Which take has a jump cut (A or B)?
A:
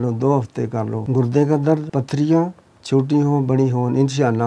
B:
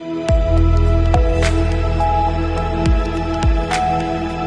A